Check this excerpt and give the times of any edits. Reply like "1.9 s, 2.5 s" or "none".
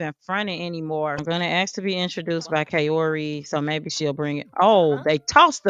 1.2 s